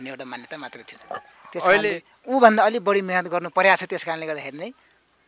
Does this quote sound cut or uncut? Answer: cut